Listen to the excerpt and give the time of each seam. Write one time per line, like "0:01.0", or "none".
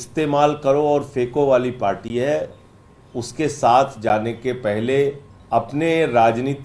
0:05.3